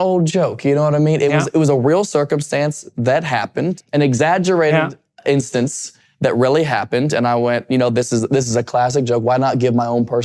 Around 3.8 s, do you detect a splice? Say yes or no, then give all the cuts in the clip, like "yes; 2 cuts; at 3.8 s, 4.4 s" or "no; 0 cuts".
yes; 1 cut; at 3.8 s